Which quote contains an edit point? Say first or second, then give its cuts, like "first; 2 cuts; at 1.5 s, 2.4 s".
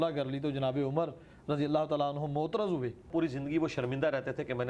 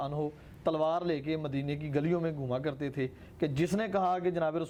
first; 1 cut; at 3.1 s